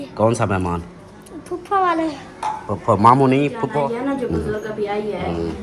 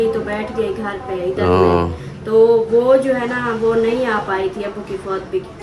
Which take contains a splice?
first; 1 cut; at 3.7 s

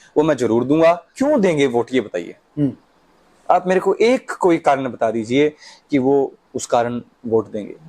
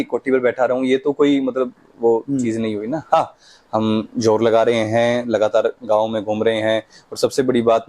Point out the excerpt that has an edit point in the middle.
first; 1 cut; at 1.1 s

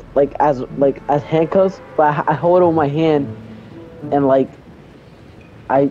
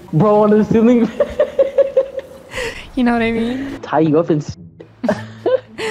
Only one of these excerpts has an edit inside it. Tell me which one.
second; 1 cut; at 3.8 s

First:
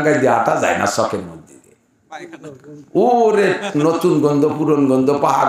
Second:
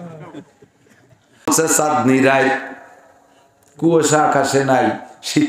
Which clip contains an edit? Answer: second; 1 cut; at 1.5 s

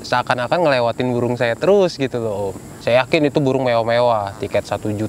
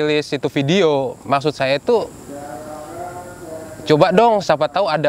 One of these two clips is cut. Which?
first; 1 cut; at 2.7 s

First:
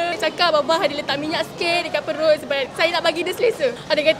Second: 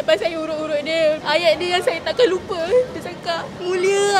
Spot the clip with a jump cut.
second; 1 cut; at 1.2 s

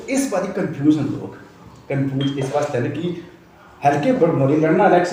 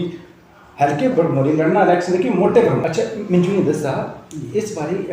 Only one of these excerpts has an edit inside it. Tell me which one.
second; 1 cut; at 3.0 s

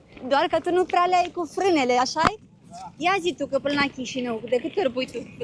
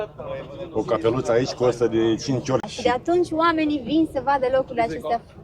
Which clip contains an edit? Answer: second; 1 cut; at 2.7 s

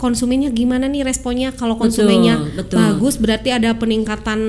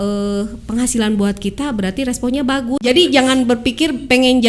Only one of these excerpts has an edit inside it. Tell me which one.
second; 1 cut; at 2.8 s

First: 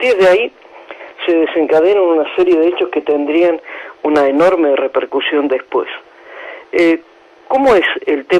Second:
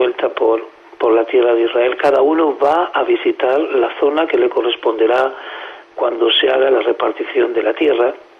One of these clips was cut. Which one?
second; 1 cut; at 5.9 s

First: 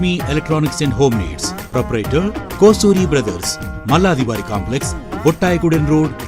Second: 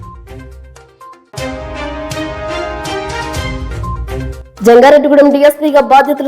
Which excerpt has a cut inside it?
second; 1 cut; at 4.4 s

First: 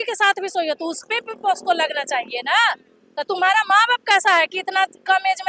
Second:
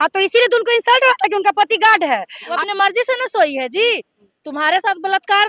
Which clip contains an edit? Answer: second; 1 cut; at 2.4 s

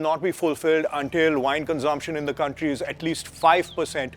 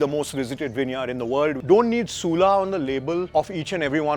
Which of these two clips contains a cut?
second; 2 cuts; at 1.6 s, 3.3 s

